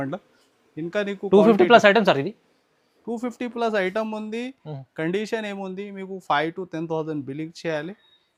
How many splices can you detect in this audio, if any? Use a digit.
0